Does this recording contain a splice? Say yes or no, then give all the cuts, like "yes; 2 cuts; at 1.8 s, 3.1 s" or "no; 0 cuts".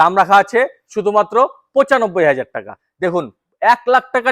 no; 0 cuts